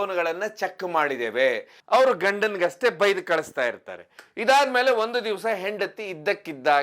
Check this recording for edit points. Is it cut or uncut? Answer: cut